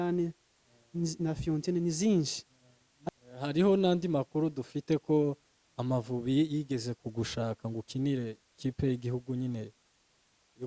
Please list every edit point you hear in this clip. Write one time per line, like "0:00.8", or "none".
0:02.9